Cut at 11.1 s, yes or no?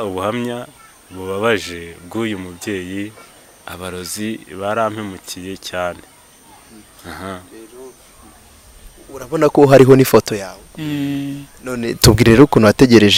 no